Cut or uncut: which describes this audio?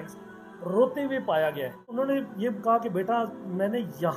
cut